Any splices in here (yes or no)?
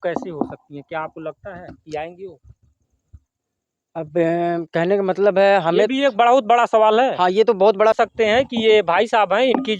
yes